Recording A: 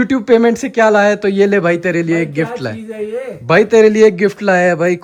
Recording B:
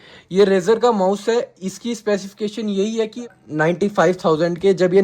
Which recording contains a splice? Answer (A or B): B